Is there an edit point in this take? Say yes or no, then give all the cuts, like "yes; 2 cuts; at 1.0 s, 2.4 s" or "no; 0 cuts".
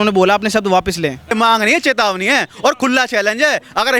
yes; 1 cut; at 1.3 s